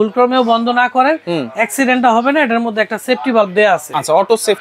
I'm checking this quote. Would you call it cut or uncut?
uncut